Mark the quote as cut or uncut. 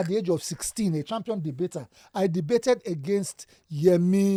uncut